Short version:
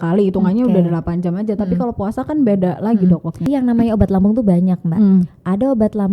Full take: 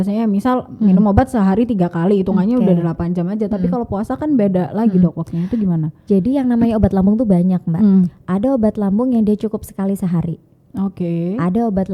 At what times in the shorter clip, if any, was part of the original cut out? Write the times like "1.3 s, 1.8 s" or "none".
3.4 s

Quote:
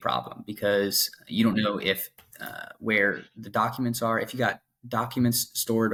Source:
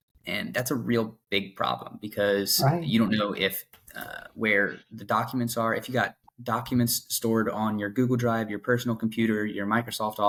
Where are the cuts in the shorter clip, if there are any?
none

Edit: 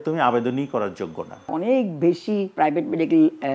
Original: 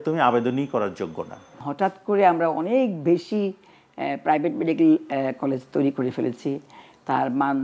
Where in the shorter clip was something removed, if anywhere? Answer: 1.5 s, 2.5 s

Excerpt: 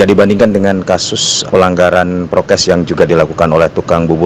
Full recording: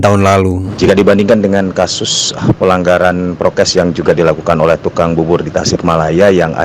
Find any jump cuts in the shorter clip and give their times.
1.5 s

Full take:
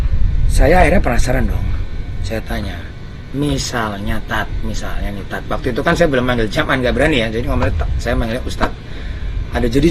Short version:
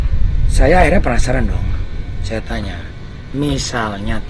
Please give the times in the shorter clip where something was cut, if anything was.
none

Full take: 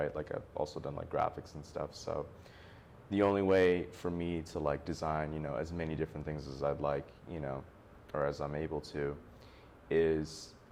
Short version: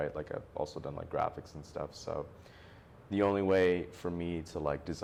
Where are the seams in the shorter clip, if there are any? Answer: none

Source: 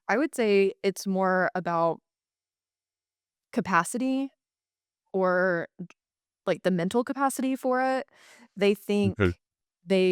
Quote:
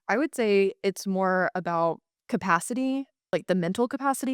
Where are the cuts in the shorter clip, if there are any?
2.1 s, 3.2 s

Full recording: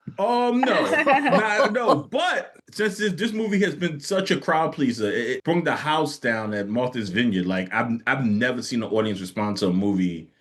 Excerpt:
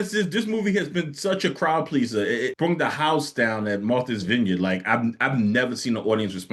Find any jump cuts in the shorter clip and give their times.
none

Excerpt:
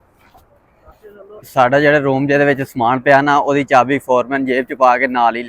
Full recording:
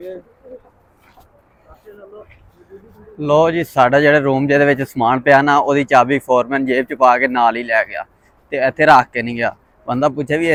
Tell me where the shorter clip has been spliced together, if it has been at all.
1.5 s

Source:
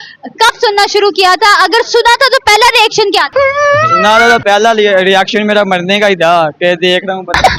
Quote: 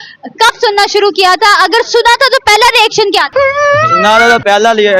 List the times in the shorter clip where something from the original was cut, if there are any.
none

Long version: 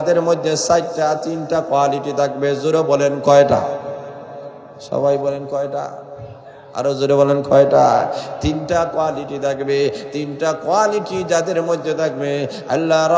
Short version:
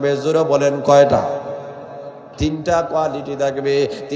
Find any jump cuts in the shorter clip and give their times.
2.3 s

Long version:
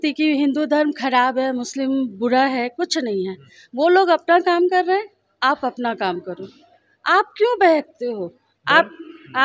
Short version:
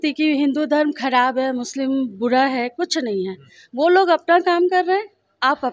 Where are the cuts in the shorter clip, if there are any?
none

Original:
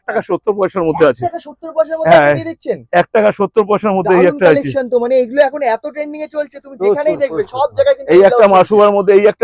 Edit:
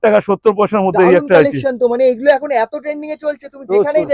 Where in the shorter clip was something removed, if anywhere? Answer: none

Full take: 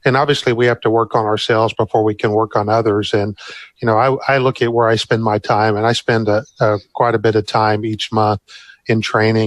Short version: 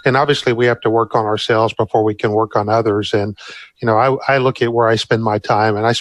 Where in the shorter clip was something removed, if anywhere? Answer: none

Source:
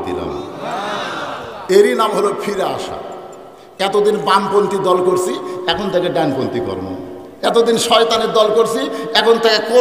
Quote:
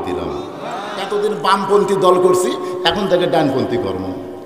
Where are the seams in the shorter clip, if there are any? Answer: 0.9 s

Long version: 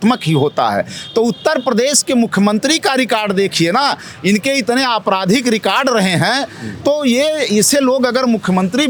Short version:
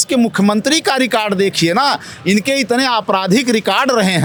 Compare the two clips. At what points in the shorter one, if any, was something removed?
none

